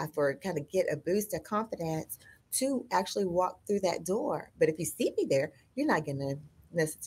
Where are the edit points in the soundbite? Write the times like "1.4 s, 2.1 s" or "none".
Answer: none